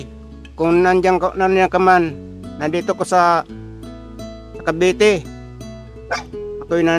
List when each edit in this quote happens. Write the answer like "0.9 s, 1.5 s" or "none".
none